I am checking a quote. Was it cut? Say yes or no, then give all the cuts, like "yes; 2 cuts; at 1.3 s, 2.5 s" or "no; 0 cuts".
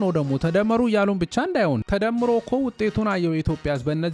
no; 0 cuts